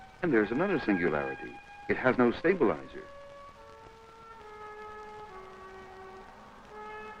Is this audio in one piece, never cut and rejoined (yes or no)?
yes